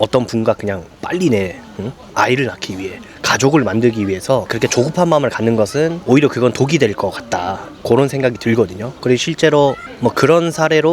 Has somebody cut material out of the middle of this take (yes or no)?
yes